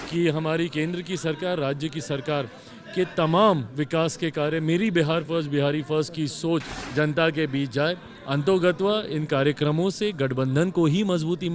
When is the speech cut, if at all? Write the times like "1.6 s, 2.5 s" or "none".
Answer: 6.8 s

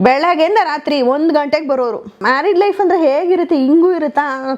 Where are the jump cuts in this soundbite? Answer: 2.1 s

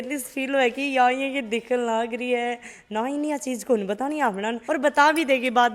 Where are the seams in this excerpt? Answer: none

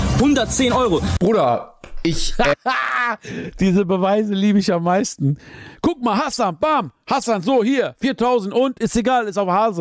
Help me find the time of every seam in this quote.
none

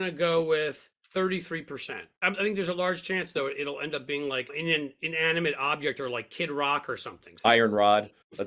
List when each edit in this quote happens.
7.3 s

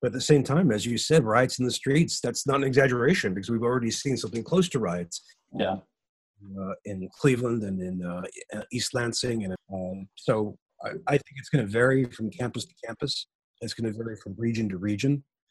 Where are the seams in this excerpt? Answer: 9.6 s

